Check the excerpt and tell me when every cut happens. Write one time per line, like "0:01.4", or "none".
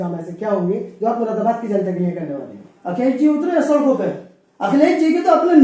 0:02.8